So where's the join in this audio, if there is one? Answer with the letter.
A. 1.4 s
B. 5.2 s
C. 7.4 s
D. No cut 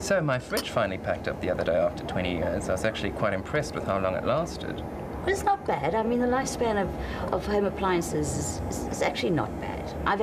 A